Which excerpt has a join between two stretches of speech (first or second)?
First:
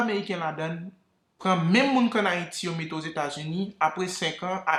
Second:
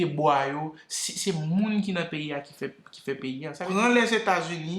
second